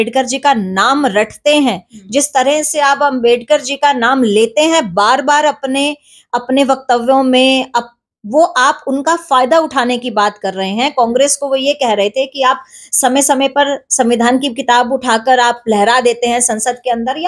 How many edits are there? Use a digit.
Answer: 0